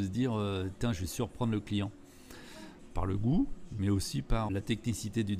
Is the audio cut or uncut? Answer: cut